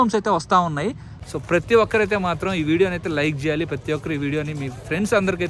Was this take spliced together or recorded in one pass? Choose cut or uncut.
uncut